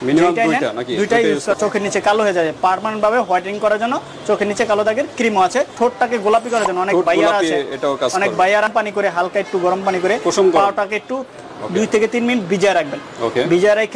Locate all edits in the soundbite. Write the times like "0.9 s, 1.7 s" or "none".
1.6 s, 5.7 s, 8.7 s